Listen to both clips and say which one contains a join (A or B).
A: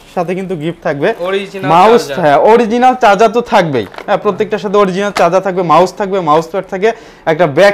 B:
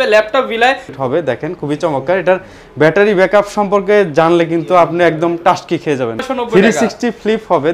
B